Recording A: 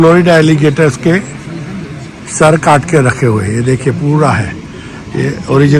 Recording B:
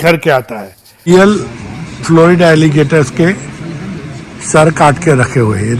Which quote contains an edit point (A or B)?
B